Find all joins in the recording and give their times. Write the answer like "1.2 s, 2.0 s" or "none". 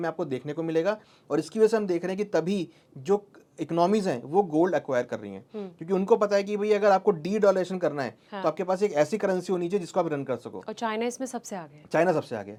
none